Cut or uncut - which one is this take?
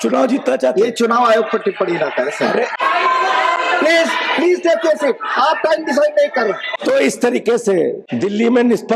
cut